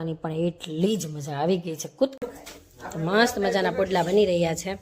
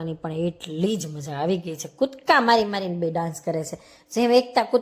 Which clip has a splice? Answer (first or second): first